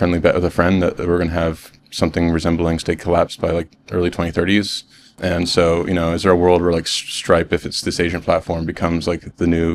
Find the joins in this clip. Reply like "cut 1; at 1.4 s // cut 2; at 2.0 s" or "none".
cut 1; at 5.1 s